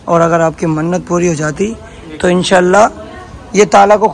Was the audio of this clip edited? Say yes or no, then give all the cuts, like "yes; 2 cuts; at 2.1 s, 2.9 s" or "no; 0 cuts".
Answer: no; 0 cuts